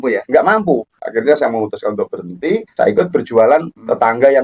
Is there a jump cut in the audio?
yes; 1 cut; at 1.0 s

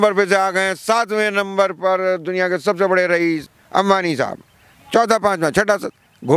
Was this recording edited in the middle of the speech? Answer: yes; 1 cut; at 3.5 s

